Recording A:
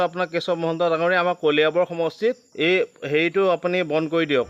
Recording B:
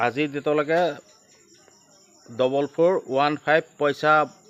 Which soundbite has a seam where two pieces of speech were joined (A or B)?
A